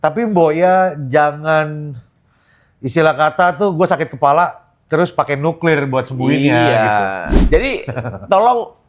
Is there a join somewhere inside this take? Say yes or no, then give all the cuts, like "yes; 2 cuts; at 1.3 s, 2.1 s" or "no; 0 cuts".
yes; 1 cut; at 7.3 s